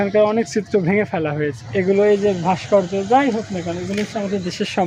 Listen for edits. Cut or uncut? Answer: cut